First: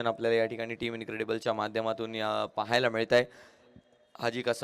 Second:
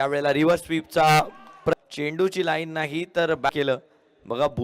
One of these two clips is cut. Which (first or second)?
second